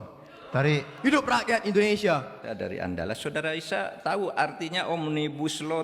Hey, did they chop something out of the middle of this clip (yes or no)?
yes